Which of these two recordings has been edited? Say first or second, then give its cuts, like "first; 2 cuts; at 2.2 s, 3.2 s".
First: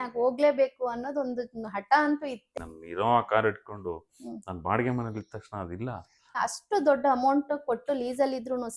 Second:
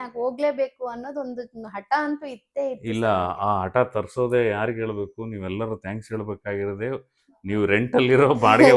first; 2 cuts; at 2.5 s, 6.4 s